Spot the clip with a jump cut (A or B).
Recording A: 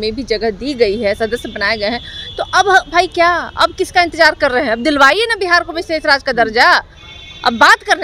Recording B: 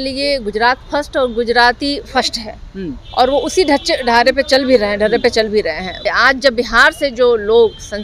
B